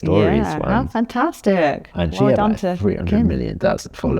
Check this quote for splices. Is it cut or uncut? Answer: uncut